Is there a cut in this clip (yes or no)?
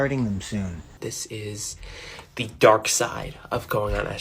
yes